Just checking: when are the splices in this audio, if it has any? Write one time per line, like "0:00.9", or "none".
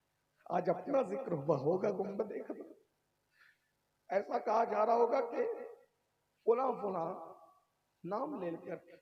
none